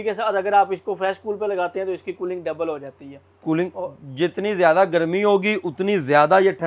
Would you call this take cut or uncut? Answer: uncut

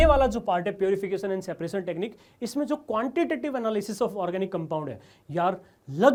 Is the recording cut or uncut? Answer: uncut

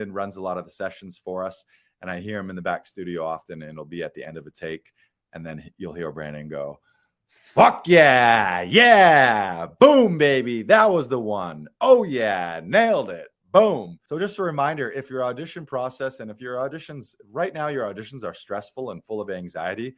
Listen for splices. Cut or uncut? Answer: cut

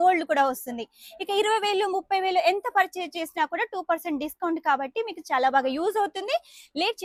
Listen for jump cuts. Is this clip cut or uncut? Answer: uncut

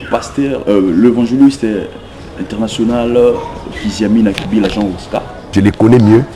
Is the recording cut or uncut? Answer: cut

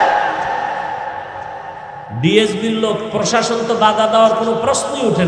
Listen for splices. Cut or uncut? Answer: cut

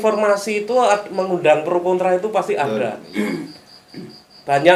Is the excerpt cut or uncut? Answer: uncut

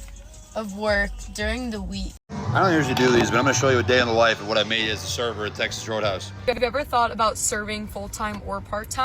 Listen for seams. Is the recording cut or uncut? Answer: cut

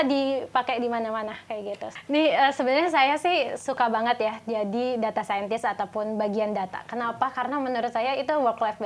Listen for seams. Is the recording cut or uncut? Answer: cut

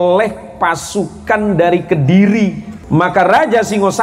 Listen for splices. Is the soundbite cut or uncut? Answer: cut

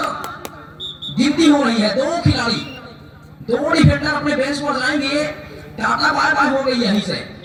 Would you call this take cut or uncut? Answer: uncut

